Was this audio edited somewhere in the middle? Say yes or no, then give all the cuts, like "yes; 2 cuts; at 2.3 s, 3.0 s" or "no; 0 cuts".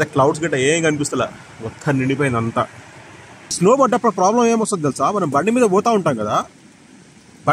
yes; 1 cut; at 3.5 s